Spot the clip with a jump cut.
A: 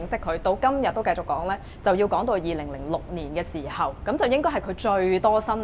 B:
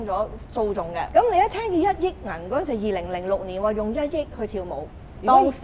B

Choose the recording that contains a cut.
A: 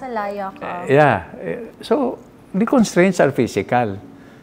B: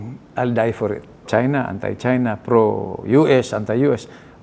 B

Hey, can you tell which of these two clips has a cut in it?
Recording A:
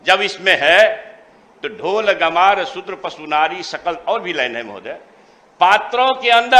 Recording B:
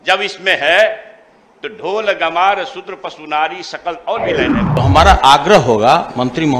B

